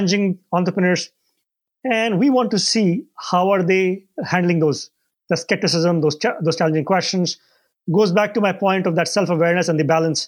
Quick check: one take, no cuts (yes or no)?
yes